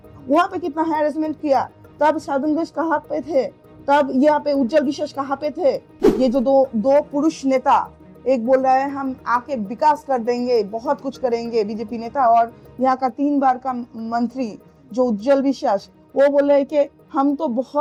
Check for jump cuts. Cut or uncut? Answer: uncut